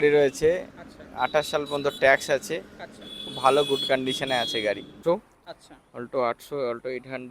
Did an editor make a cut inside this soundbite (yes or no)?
yes